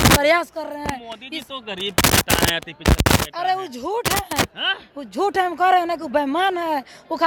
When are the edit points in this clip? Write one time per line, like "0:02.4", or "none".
none